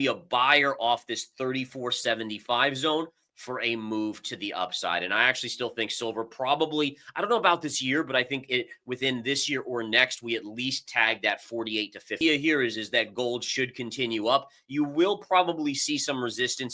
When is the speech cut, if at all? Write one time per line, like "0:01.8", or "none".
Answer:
0:12.2